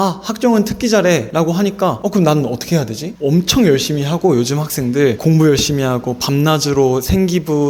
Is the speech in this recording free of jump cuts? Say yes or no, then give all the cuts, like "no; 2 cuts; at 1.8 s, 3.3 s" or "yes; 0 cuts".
no; 2 cuts; at 1.6 s, 3.1 s